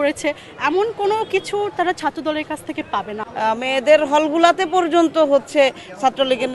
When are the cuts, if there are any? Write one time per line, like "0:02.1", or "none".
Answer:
0:03.2

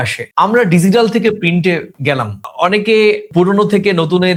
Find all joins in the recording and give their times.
none

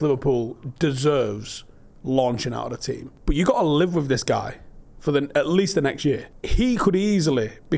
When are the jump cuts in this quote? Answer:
0:03.1
0:06.4

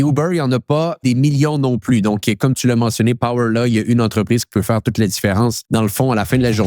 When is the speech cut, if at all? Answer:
0:01.0
0:05.6

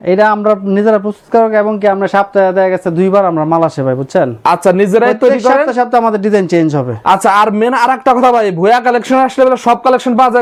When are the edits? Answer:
none

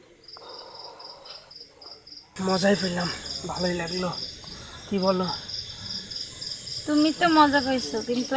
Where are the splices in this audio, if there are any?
0:02.3

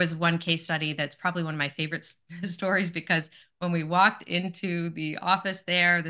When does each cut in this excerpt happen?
none

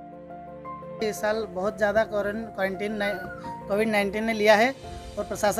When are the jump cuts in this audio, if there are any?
0:01.0

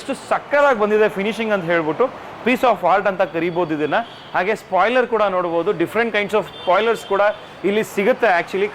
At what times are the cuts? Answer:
none

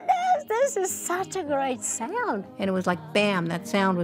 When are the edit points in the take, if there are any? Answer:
0:02.5

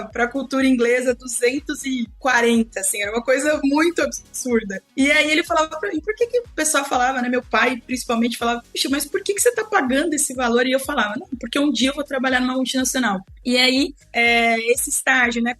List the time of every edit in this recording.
none

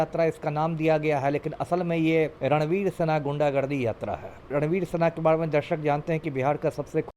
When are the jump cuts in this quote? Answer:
0:02.4
0:04.4

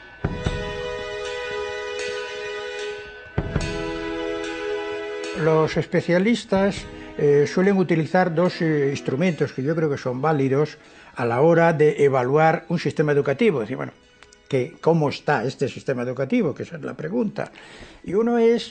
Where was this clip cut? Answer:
none

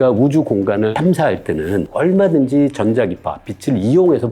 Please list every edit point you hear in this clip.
0:00.9

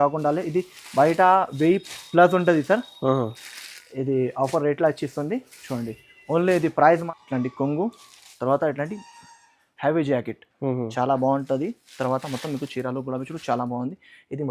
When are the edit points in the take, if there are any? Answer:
0:07.0

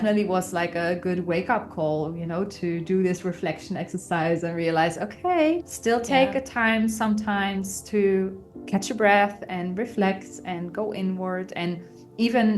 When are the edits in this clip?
none

